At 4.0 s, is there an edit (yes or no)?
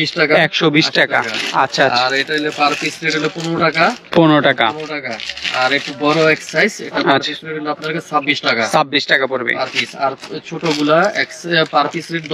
no